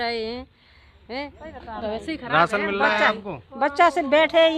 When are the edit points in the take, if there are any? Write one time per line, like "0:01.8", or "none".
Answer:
none